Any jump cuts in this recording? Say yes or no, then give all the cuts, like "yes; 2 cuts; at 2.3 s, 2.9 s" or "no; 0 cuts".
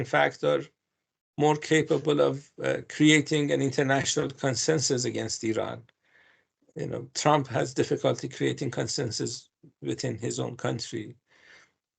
no; 0 cuts